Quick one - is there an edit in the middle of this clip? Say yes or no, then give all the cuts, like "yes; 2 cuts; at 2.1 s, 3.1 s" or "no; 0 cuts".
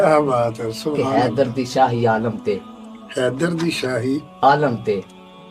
yes; 1 cut; at 1.0 s